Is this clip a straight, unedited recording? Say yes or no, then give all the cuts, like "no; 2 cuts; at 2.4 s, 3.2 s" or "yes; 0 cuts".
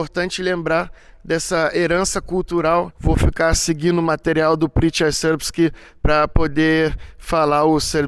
no; 1 cut; at 2.9 s